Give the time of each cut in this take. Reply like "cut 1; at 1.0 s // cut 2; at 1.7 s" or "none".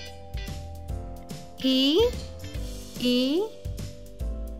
cut 1; at 3.5 s